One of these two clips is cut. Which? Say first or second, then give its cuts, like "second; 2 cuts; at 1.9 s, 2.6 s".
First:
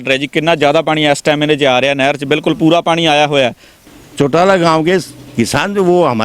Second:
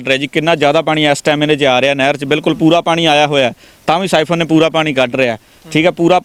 first; 1 cut; at 3.7 s